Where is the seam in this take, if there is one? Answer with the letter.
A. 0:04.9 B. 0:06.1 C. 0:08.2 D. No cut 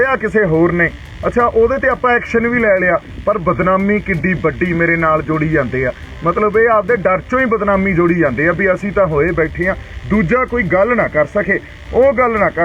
D